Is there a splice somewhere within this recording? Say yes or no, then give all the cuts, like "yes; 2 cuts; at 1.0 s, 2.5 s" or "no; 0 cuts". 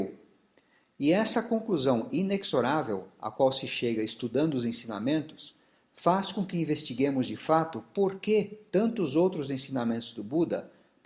no; 0 cuts